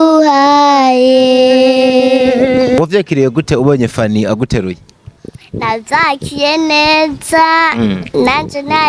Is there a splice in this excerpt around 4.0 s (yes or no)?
no